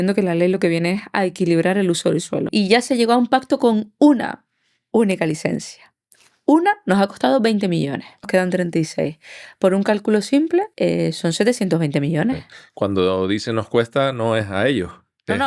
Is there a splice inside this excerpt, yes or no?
yes